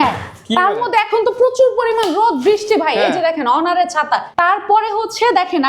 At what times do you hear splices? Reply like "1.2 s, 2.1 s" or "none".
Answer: 4.3 s